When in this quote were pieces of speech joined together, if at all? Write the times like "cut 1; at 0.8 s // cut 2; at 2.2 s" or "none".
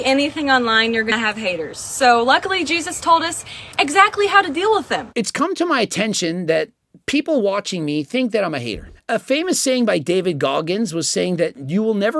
none

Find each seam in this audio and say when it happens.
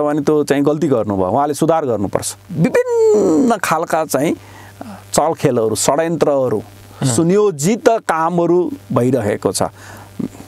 cut 1; at 2.4 s

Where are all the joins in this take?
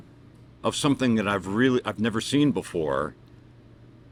none

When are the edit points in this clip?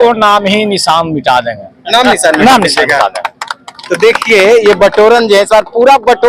none

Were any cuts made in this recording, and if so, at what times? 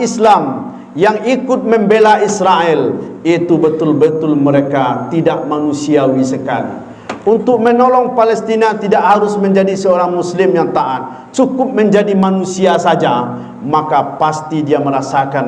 none

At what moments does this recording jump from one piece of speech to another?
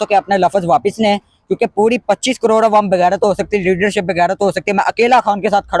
none

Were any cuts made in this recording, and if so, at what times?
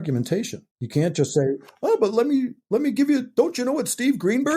none

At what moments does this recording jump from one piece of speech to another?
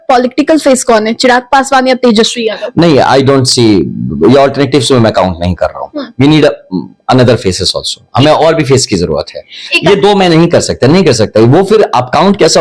none

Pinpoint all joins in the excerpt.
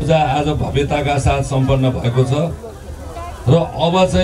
none

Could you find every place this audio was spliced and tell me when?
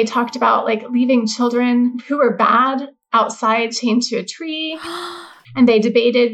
cut 1; at 2.0 s // cut 2; at 3.0 s // cut 3; at 5.1 s

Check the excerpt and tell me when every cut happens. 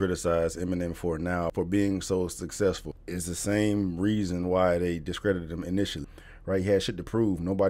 cut 1; at 1.5 s // cut 2; at 2.9 s // cut 3; at 6.1 s

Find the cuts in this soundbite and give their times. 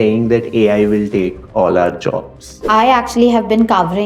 cut 1; at 2.6 s

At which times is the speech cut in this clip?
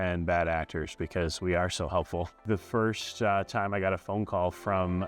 cut 1; at 2.4 s

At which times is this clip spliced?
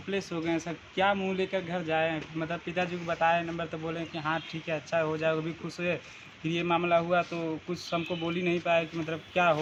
none

